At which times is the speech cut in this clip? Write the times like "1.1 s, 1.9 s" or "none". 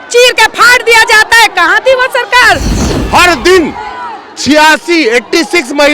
2.8 s